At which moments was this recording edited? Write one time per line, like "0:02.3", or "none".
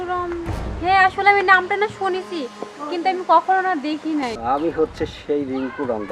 0:04.4